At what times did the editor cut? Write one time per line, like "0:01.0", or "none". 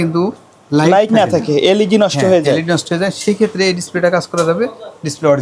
none